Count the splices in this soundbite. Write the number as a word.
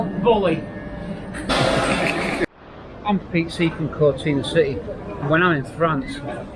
one